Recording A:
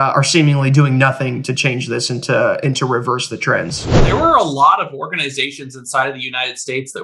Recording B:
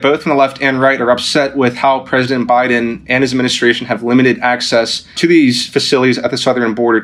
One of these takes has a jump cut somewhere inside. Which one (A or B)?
A